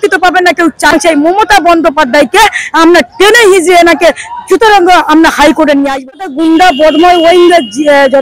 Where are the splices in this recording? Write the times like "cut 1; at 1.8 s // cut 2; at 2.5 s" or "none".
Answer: cut 1; at 0.9 s // cut 2; at 6.2 s